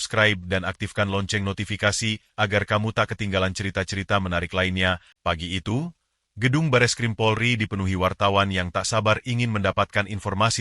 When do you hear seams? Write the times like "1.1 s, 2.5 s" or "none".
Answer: 5.1 s